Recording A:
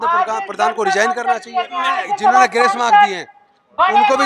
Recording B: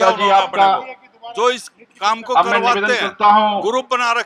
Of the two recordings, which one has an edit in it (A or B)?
A